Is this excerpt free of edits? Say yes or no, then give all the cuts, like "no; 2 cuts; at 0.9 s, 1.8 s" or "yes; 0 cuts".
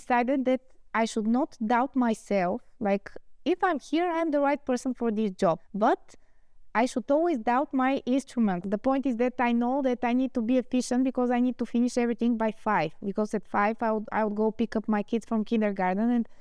no; 2 cuts; at 5.7 s, 8.6 s